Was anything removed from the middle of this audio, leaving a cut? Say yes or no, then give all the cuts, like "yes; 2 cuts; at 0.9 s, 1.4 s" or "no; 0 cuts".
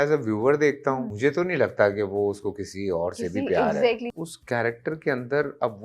yes; 2 cuts; at 1.1 s, 4.1 s